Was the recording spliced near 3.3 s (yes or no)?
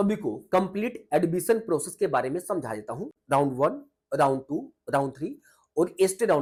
no